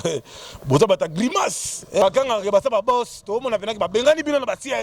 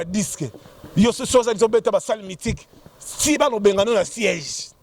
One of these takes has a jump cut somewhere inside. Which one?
first; 1 cut; at 2.0 s

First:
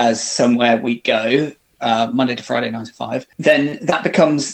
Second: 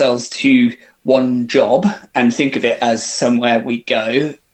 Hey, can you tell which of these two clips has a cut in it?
first; 1 cut; at 3.3 s

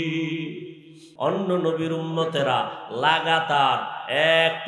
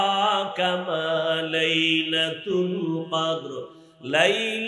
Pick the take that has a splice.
first; 1 cut; at 1.1 s

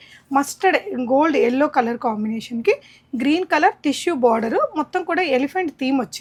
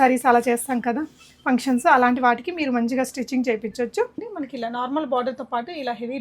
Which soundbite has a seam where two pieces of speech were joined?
second; 1 cut; at 4.2 s

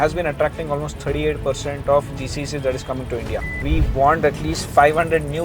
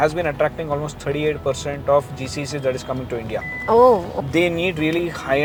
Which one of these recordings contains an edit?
first; 1 cut; at 3.6 s

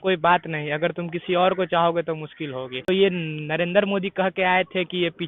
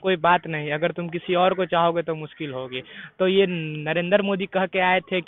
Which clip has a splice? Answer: first; 1 cut; at 2.9 s

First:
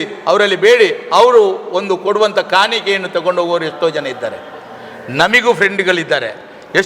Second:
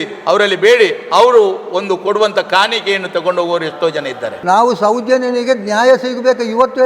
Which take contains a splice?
second; 1 cut; at 4.3 s

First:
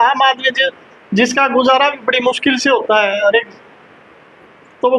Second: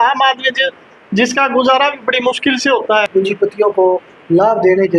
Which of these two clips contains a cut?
second; 1 cut; at 3.1 s

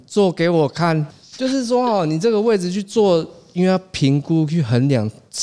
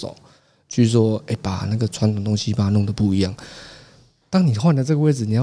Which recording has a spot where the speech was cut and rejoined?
first; 1 cut; at 1.1 s

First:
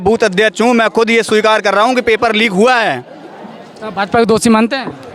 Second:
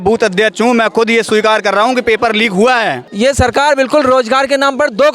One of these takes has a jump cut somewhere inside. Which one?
second; 1 cut; at 3.1 s

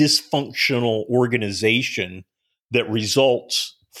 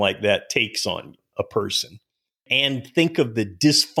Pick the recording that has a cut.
second; 2 cuts; at 1.2 s, 2.4 s

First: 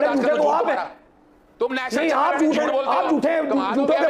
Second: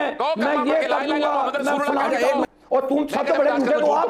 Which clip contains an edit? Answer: second; 1 cut; at 2.5 s

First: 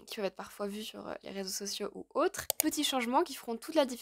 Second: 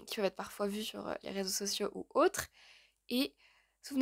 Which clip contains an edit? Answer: first; 1 cut; at 2.6 s

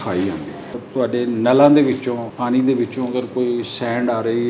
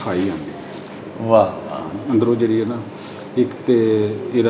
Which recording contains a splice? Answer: first; 2 cuts; at 0.8 s, 2.3 s

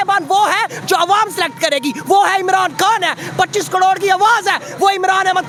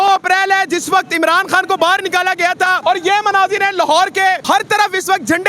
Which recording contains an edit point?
second; 2 cuts; at 2.8 s, 4.4 s

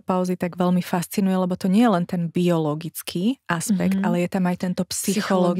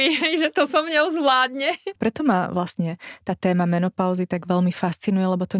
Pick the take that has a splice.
second; 1 cut; at 2.0 s

